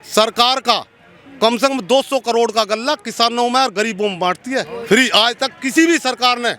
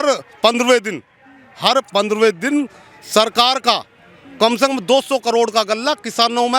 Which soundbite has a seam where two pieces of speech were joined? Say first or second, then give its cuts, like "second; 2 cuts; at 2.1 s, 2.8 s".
first; 1 cut; at 4.7 s